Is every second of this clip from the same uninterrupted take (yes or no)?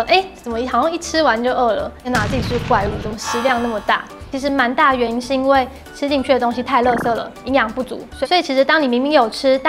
no